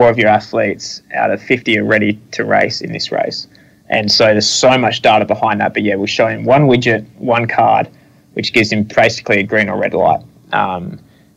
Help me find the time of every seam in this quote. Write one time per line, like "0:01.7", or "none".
none

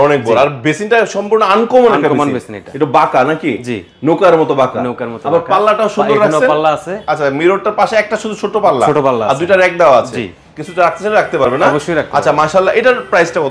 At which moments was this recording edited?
none

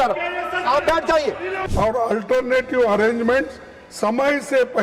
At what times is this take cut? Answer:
0:01.5

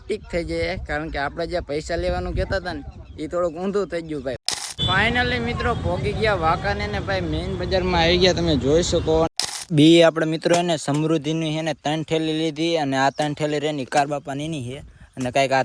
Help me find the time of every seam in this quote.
0:04.4
0:09.7

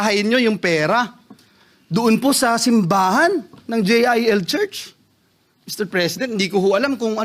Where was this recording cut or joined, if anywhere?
none

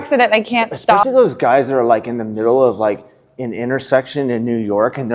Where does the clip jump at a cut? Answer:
0:01.0

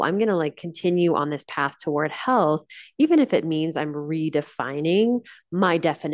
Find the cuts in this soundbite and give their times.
none

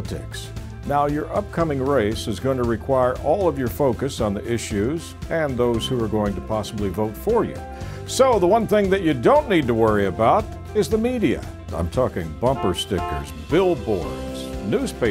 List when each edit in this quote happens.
none

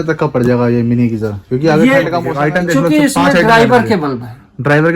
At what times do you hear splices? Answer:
0:02.3

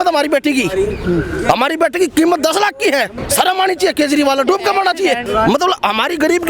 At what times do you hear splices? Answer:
0:03.2
0:05.2

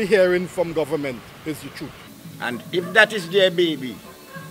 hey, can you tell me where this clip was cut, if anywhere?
0:02.0

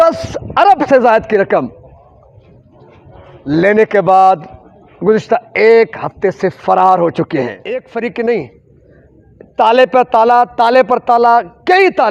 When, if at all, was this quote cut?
0:07.9

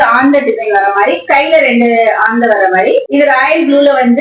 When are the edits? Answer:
0:03.1

